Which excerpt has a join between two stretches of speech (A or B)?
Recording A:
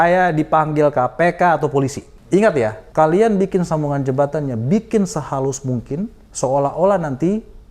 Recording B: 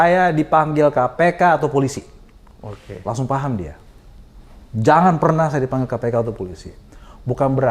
A